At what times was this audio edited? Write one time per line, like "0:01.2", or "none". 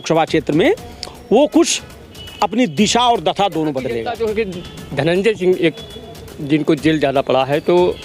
0:04.1